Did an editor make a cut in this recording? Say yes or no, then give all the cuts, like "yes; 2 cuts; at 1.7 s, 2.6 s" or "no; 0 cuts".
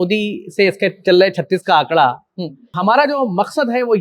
yes; 1 cut; at 2.7 s